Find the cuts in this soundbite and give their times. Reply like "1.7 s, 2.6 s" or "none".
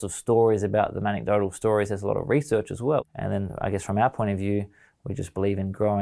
3.0 s